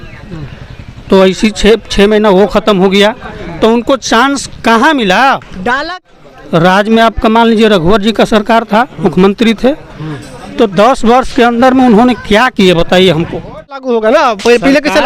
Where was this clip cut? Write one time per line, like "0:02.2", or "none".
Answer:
0:05.9
0:13.8